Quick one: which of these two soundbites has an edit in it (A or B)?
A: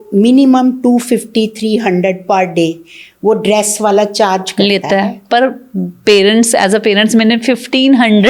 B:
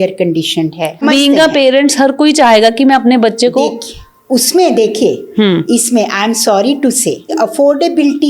B